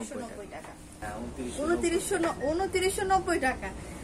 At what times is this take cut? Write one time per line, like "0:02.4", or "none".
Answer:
0:01.1